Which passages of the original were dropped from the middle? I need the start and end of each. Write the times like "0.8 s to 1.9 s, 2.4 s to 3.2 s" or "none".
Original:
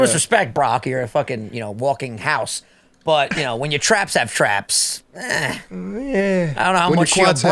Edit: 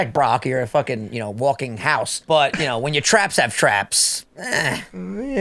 2.6 s to 2.9 s